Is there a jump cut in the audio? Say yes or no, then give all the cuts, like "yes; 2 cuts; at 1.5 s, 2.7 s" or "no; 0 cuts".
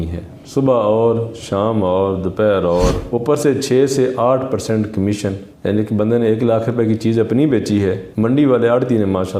yes; 1 cut; at 3.0 s